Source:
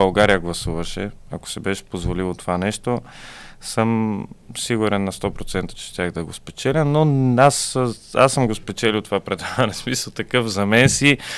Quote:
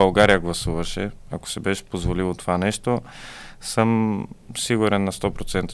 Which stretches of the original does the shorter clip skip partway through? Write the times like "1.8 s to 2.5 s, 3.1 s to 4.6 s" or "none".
none